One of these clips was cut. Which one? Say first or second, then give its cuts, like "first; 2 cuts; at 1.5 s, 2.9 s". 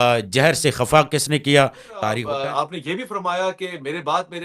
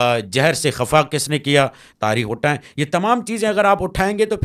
first; 1 cut; at 2.2 s